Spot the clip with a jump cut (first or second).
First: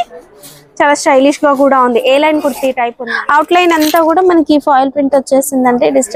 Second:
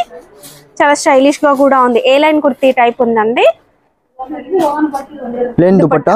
first